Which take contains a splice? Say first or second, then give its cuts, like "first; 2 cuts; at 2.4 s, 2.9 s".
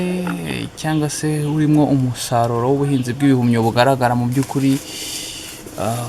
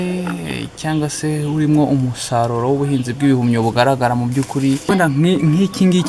second; 1 cut; at 4.9 s